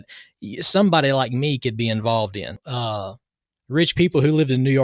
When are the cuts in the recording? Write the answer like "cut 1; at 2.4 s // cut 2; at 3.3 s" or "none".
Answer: cut 1; at 2.5 s